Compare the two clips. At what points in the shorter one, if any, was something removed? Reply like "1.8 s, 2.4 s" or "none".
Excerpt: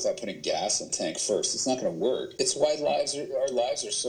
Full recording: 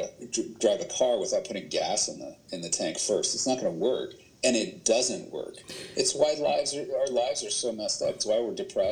0.9 s, 2.3 s